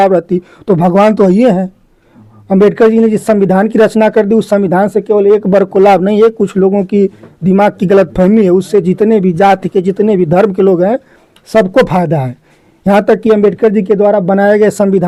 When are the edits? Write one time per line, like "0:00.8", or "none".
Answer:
none